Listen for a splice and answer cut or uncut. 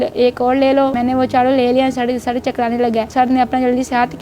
cut